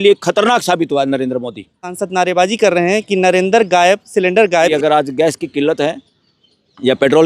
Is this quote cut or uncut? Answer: cut